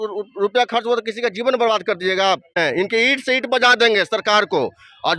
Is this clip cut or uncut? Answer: cut